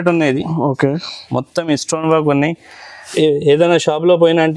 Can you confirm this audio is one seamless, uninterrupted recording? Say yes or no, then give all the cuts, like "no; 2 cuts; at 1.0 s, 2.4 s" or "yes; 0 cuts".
no; 1 cut; at 3.0 s